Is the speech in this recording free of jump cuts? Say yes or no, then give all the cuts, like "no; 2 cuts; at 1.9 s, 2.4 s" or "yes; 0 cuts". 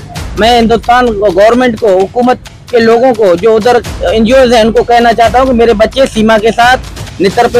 yes; 0 cuts